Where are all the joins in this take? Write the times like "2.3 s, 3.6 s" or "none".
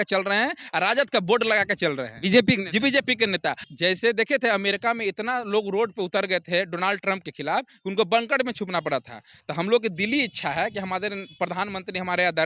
3.7 s